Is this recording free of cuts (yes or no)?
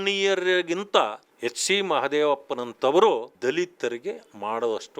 no